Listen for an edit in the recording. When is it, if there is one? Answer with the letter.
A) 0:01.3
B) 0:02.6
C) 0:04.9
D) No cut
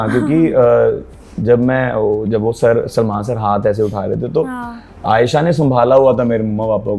D